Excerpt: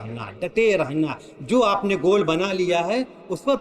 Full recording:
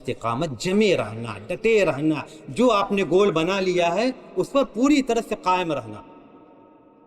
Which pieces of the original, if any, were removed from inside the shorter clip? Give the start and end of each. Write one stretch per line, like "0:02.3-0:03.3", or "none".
none